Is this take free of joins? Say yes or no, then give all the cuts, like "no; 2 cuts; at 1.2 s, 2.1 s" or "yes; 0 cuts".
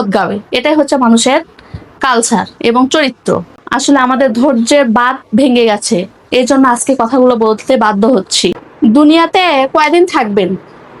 no; 2 cuts; at 3.5 s, 8.6 s